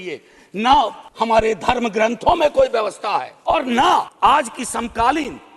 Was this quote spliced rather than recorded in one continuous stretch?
yes; 3 cuts; at 1.0 s, 3.3 s, 4.1 s

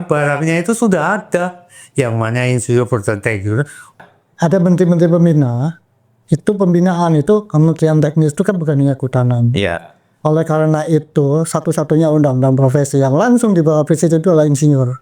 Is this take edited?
yes; 1 cut; at 4.0 s

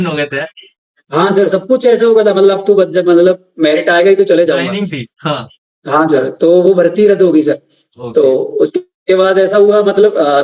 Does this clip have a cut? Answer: no; 0 cuts

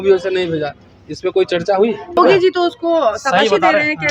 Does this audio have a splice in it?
yes; 1 cut; at 2.2 s

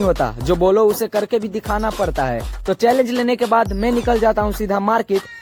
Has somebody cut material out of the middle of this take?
no; 0 cuts

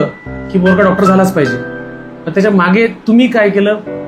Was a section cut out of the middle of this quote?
no; 0 cuts

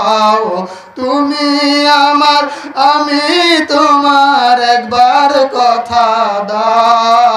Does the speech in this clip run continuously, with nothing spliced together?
yes; 0 cuts

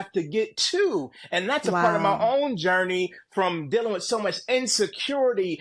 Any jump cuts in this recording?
no; 0 cuts

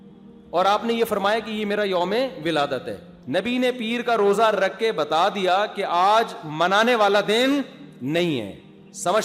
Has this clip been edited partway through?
yes; 1 cut; at 3.1 s

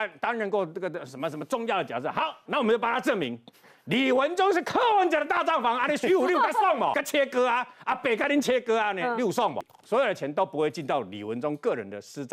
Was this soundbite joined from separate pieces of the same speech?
yes; 2 cuts; at 7.0 s, 9.7 s

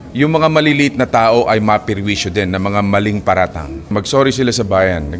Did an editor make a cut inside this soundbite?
yes; 1 cut; at 3.9 s

